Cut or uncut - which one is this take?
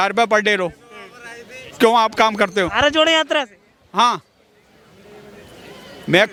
uncut